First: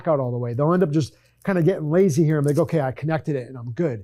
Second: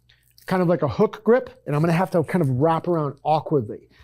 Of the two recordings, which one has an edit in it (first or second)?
second